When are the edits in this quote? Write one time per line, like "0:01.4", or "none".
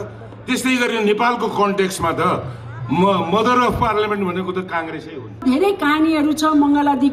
0:05.4